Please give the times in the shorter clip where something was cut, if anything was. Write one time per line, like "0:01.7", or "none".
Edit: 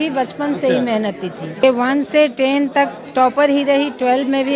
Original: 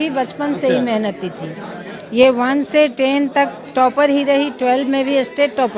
0:01.6